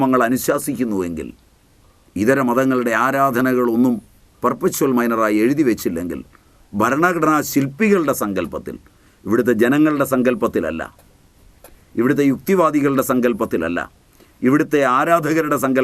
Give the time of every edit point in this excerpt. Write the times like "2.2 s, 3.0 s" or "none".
1.9 s